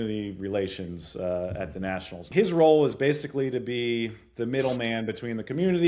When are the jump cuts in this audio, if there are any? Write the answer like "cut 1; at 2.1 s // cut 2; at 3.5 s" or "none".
cut 1; at 2.3 s